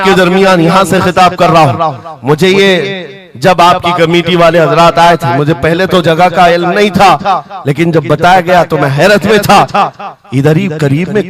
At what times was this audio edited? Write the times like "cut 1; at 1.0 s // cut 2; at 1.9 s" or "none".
none